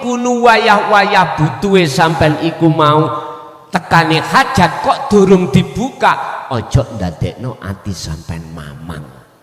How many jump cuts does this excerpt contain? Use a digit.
0